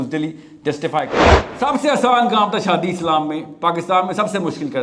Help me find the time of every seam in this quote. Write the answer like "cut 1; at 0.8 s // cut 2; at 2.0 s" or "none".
cut 1; at 1.4 s